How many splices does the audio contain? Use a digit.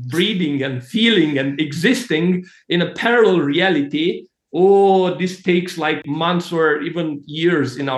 1